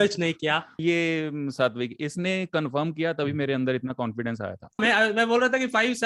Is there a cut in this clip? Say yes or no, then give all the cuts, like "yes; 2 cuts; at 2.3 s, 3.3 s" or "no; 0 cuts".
yes; 2 cuts; at 0.8 s, 4.8 s